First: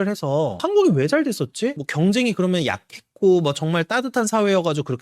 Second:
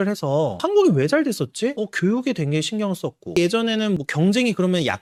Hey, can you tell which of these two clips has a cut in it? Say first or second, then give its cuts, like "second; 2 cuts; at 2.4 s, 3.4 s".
first; 1 cut; at 1.8 s